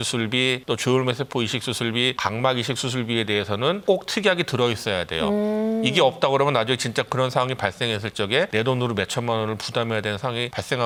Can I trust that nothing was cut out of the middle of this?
yes; 0 cuts

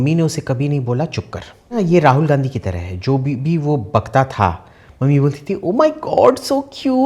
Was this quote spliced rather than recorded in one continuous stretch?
yes; 1 cut; at 1.8 s

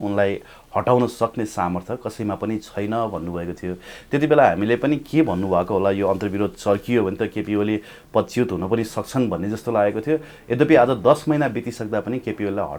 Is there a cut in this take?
no; 0 cuts

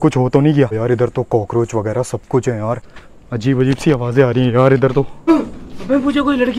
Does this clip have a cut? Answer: yes; 3 cuts; at 0.7 s, 3.0 s, 5.3 s

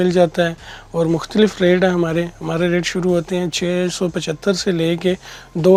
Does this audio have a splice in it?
no; 0 cuts

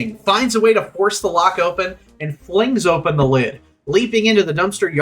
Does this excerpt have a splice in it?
no; 0 cuts

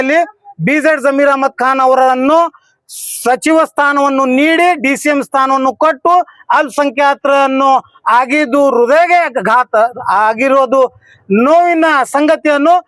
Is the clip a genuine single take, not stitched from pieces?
yes; 0 cuts

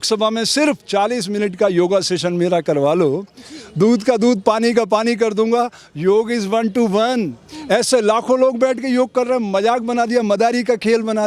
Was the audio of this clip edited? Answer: no; 0 cuts

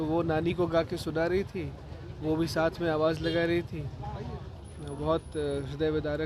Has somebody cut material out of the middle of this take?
no; 0 cuts

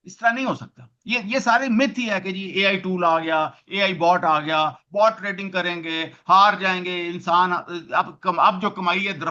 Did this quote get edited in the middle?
no; 0 cuts

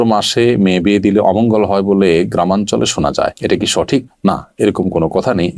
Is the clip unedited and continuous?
yes; 0 cuts

